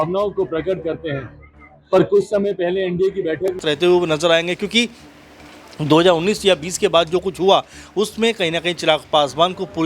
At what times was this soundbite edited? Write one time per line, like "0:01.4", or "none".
0:03.6